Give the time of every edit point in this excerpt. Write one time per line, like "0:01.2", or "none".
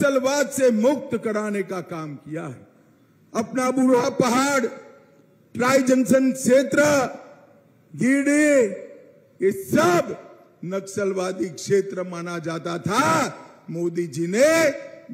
none